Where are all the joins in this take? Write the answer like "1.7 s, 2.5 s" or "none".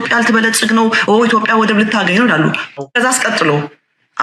2.6 s